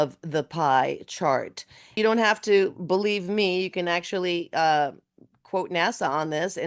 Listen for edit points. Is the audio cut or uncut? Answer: cut